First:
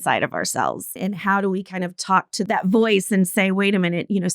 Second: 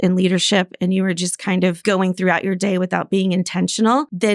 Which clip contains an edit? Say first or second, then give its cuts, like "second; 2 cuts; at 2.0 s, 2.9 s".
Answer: first; 2 cuts; at 1.0 s, 2.5 s